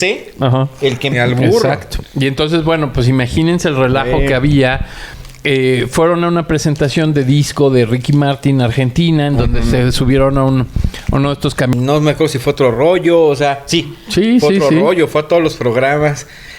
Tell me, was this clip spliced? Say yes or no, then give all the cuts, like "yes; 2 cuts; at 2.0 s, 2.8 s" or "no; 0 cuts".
yes; 2 cuts; at 1.1 s, 11.7 s